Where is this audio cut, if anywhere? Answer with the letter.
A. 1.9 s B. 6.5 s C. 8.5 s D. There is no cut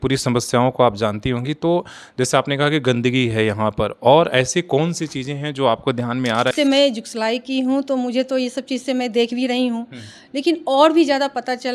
B